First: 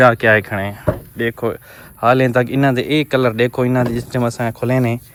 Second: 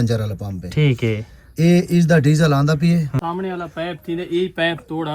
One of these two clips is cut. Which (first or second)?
second